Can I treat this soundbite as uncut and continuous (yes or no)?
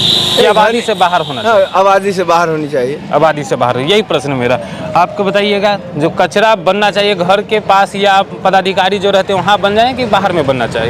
yes